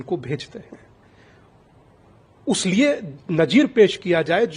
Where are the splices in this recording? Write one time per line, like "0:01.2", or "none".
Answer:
none